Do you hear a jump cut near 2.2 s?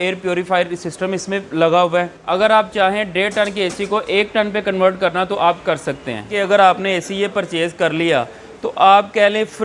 yes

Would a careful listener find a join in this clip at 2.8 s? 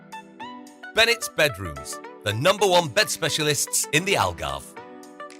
no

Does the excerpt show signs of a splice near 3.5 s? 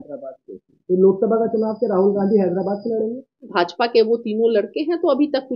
yes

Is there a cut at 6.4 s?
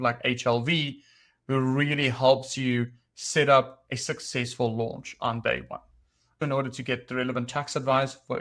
yes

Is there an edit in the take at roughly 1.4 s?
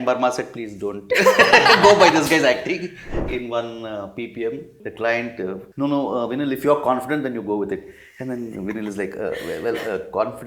no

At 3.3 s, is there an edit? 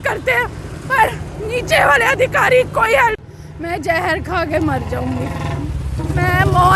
yes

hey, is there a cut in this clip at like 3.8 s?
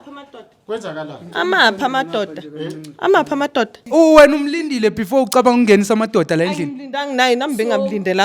yes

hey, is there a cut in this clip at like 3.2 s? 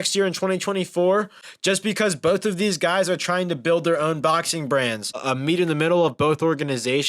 no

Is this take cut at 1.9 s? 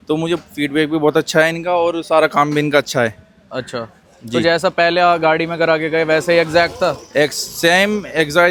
no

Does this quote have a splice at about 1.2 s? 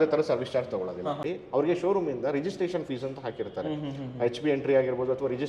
yes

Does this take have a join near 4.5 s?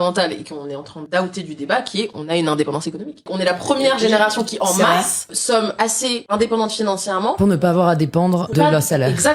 yes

